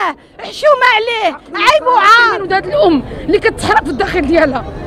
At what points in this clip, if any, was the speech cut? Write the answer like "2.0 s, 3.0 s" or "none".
2.4 s